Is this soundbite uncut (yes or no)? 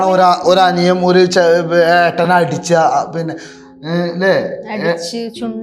yes